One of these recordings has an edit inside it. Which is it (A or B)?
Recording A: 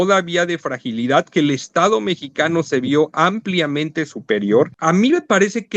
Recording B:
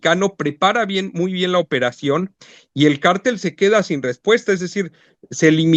A